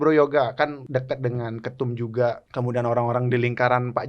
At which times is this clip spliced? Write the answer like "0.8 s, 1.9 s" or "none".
0.8 s, 2.4 s